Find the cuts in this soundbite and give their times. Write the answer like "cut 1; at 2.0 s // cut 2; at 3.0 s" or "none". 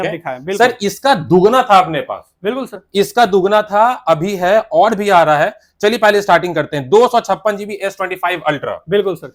none